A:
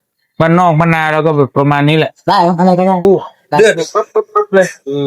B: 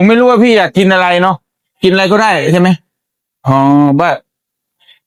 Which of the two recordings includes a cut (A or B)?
A